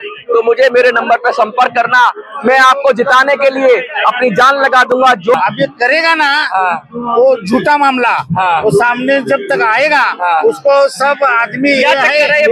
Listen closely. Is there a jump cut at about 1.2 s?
no; 1 cut; at 5.3 s

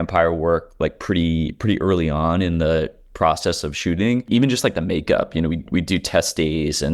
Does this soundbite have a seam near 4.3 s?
yes; 1 cut; at 4.3 s

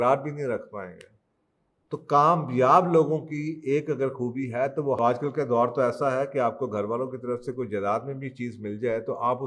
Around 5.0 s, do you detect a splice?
yes; 1 cut; at 5.0 s

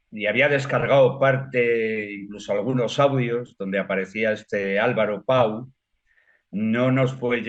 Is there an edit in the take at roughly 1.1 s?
no; 0 cuts

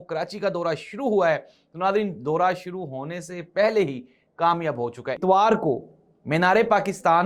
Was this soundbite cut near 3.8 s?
no; 1 cut; at 5.2 s

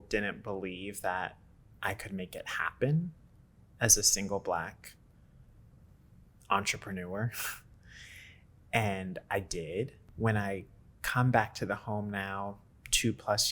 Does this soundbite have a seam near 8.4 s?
no; 1 cut; at 10.1 s

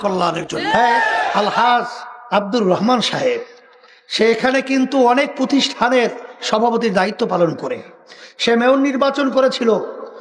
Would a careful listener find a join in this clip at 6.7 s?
no; 1 cut; at 1.2 s

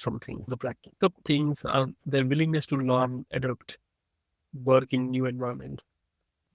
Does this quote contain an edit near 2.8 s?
no; 1 cut; at 1.0 s

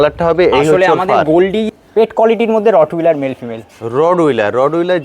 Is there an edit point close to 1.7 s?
yes; 1 cut; at 1.7 s

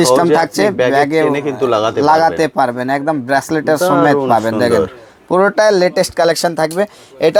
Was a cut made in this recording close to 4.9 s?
no; 0 cuts

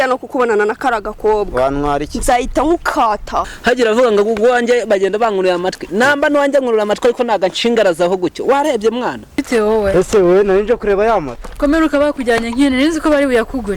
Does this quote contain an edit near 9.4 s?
yes; 2 cuts; at 3.5 s, 9.4 s

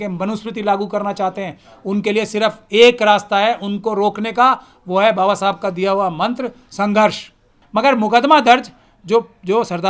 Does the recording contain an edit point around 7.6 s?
yes; 1 cut; at 7.6 s

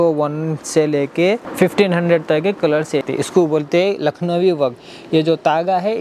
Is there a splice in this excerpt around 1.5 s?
yes; 2 cuts; at 1.5 s, 3.0 s

